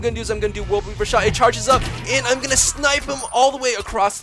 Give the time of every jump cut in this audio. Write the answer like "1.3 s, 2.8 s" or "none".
none